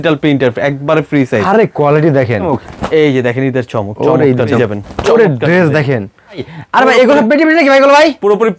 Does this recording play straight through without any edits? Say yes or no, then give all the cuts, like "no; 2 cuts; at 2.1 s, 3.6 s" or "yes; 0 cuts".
no; 3 cuts; at 2.5 s, 4.6 s, 6.5 s